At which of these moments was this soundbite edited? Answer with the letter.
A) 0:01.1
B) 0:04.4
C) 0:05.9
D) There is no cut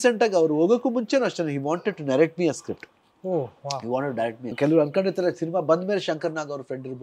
B